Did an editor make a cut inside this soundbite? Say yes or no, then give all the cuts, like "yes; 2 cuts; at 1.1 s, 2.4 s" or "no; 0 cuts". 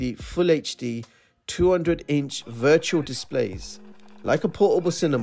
no; 0 cuts